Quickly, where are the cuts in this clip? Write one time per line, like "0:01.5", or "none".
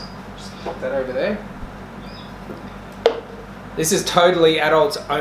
none